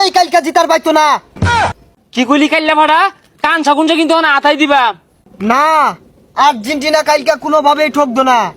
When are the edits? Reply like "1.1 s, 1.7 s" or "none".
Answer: none